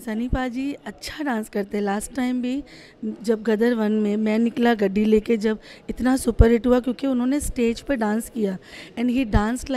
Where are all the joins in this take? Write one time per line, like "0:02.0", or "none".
none